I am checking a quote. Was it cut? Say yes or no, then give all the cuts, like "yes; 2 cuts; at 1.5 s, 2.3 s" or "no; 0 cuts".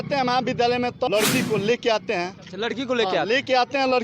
yes; 1 cut; at 1.1 s